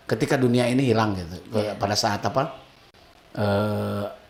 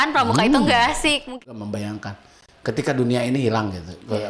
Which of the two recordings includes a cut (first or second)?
second